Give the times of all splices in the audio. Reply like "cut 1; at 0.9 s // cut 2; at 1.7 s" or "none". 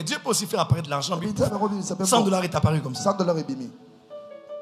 none

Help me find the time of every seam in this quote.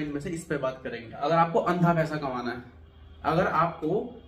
cut 1; at 1.2 s

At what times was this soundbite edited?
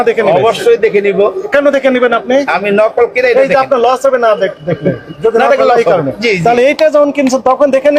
none

